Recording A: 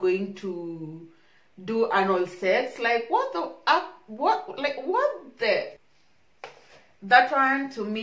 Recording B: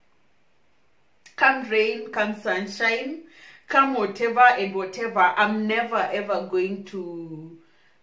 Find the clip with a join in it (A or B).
A